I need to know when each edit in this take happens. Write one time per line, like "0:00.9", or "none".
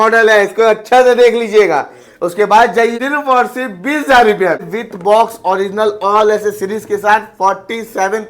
0:02.9
0:04.8

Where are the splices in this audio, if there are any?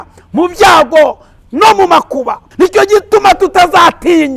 0:02.4

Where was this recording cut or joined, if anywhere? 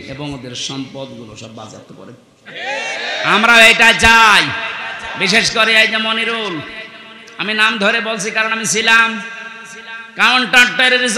none

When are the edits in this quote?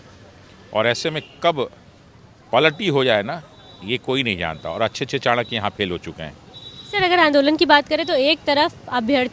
none

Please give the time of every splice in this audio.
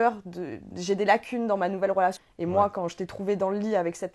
0:02.2

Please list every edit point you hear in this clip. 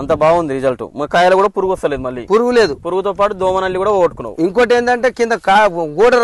none

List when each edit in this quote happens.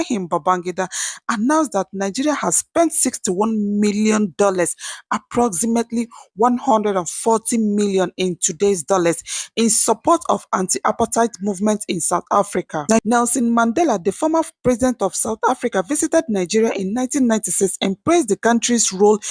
0:13.0

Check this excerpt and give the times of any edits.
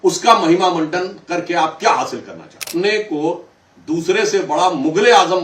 0:02.7

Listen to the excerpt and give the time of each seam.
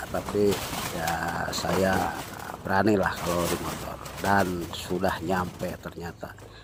none

